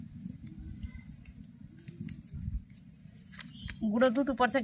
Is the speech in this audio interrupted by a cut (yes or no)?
no